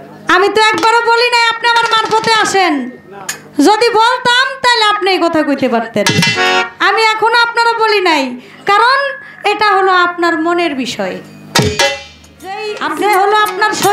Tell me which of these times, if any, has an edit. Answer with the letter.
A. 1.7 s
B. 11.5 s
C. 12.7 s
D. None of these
C